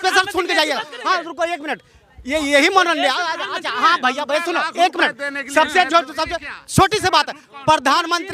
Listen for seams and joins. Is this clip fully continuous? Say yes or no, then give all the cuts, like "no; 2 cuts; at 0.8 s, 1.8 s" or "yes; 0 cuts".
yes; 0 cuts